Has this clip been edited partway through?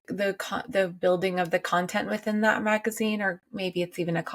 no; 0 cuts

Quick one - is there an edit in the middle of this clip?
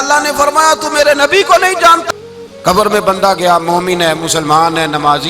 yes; 1 cut; at 2.0 s

